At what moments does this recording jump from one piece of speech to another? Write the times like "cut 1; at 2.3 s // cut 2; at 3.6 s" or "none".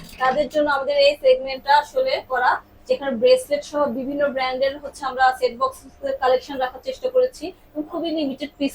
none